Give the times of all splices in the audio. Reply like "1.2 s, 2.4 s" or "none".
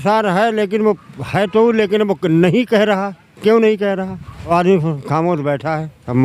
4.5 s